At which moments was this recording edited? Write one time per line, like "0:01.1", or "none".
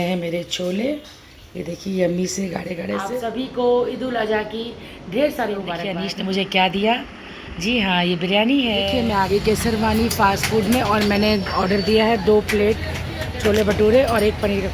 0:03.0
0:06.0
0:08.9

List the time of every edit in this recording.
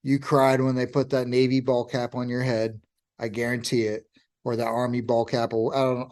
none

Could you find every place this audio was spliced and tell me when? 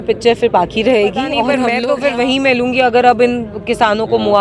0:01.7

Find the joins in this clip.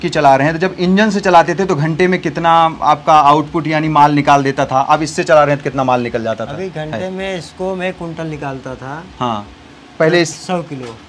none

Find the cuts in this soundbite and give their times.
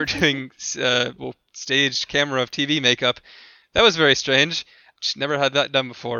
0:04.9

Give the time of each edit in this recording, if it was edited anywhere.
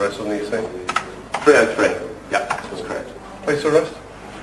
0:01.6

